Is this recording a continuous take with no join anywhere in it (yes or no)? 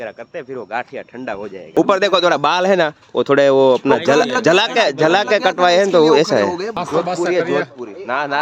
no